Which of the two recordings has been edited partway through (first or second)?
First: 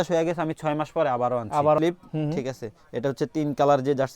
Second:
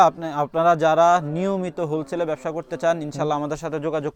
first